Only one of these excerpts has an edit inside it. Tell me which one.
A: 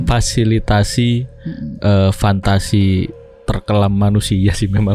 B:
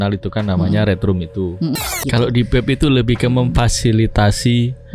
B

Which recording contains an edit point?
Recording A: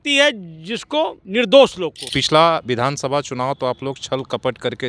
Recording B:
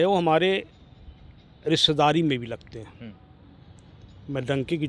A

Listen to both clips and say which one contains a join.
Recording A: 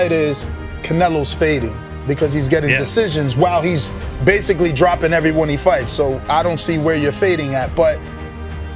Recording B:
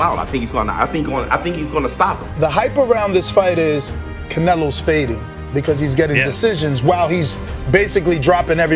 B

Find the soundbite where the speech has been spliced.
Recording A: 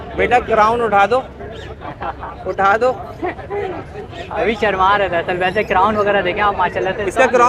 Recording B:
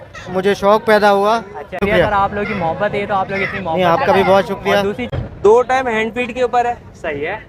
B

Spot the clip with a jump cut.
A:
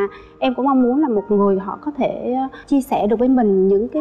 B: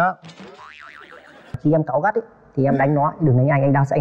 B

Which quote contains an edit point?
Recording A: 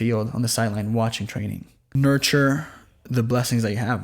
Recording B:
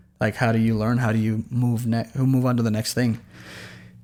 A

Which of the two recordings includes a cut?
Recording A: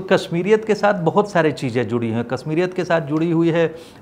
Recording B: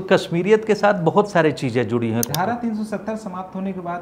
B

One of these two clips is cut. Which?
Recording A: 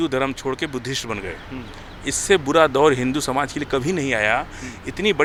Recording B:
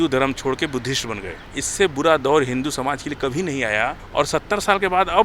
B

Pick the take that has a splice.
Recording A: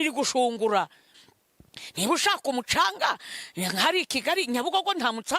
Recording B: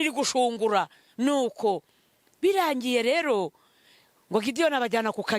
A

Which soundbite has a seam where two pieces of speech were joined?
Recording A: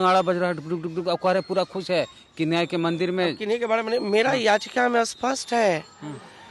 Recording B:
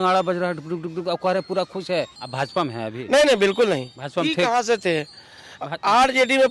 B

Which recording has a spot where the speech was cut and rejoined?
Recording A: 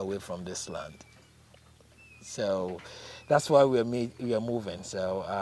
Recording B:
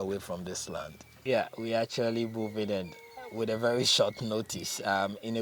B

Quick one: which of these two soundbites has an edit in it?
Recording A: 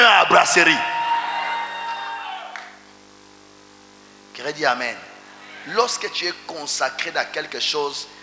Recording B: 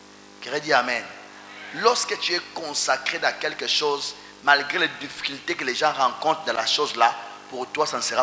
A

